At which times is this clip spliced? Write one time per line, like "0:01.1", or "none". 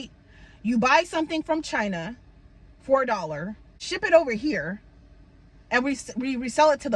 0:03.8